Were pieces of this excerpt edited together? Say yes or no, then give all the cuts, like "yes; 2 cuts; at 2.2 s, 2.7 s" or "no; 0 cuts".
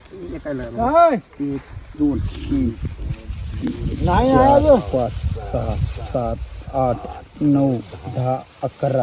no; 0 cuts